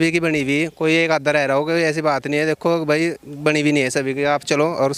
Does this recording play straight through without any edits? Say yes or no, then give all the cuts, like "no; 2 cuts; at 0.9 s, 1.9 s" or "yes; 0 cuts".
yes; 0 cuts